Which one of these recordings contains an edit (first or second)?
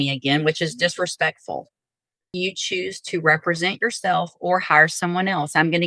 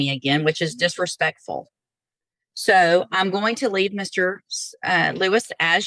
first